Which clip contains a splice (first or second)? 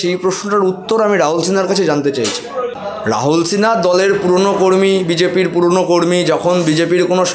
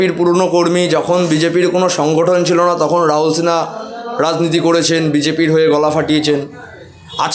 first